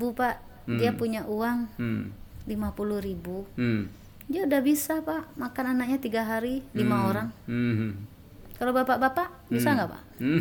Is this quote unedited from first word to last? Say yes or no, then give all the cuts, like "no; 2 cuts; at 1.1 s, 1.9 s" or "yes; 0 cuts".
yes; 0 cuts